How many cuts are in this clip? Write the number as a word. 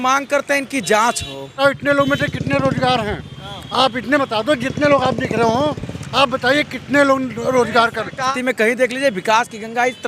two